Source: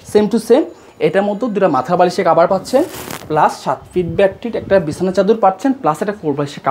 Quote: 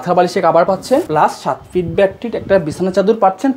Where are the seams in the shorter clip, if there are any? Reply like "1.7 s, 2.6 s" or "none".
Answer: 1.1 s